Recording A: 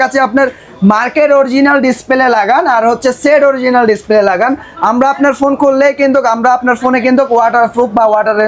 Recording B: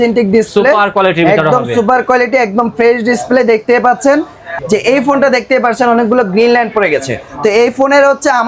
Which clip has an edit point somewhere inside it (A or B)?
B